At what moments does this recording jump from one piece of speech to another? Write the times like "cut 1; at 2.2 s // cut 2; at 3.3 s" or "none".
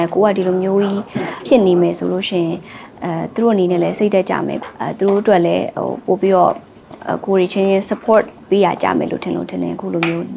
cut 1; at 1.4 s // cut 2; at 4.6 s